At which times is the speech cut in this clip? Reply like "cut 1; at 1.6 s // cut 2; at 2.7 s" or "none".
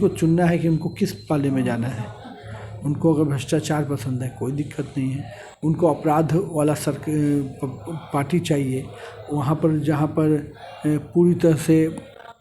none